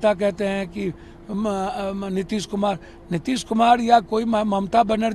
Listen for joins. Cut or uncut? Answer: uncut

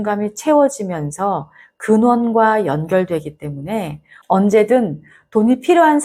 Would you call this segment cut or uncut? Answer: uncut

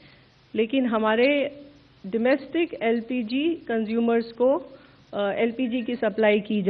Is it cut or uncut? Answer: uncut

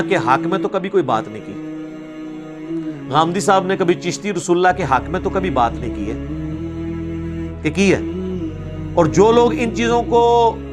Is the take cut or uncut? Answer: uncut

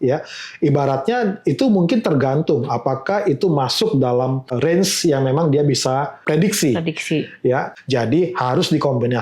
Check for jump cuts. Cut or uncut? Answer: cut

